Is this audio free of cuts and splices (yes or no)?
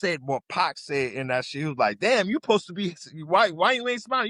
yes